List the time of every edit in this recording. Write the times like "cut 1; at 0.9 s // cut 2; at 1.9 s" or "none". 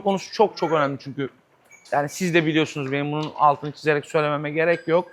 none